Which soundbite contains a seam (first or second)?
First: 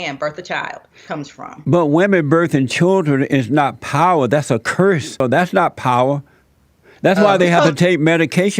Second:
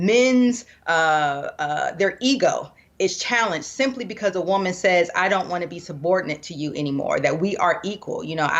first